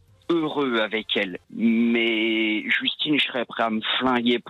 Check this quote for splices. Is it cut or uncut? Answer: cut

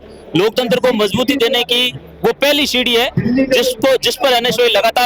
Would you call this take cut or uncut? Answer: uncut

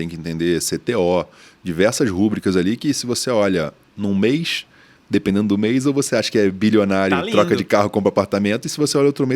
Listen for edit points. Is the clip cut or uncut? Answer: uncut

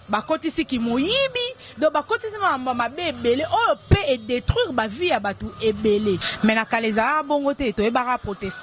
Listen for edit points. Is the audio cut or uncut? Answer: cut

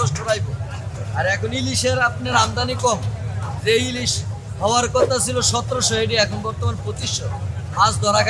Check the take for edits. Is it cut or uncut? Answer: uncut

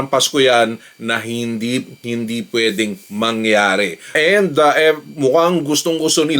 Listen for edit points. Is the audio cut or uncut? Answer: cut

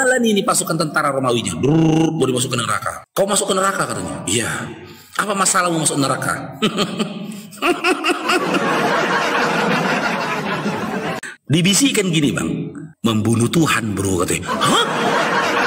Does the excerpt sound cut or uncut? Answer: cut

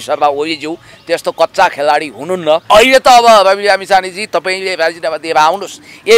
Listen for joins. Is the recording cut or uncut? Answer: cut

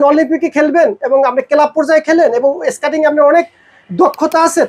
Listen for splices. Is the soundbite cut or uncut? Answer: uncut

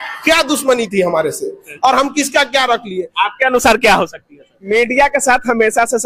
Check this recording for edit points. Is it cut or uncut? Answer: cut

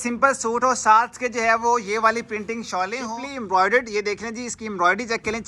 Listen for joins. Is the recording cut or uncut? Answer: cut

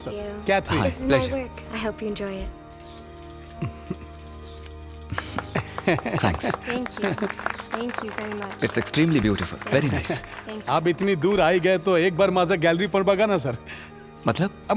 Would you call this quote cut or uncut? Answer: uncut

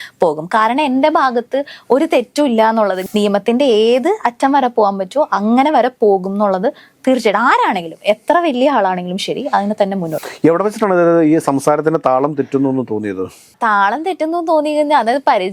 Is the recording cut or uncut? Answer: cut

